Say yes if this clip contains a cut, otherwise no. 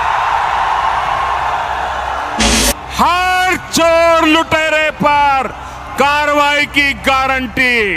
yes